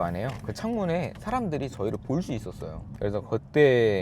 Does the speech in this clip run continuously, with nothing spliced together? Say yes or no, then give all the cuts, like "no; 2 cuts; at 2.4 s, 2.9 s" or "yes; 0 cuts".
no; 1 cut; at 2.8 s